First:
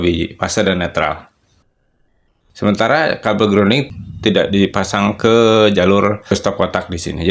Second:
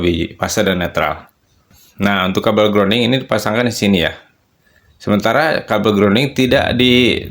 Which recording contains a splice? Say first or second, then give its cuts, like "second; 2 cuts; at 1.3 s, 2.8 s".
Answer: first; 2 cuts; at 1.8 s, 3.8 s